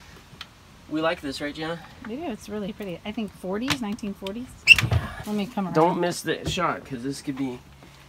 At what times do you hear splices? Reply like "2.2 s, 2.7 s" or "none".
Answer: 5.1 s